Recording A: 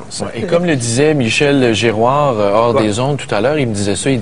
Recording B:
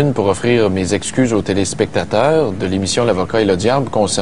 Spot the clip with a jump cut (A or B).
A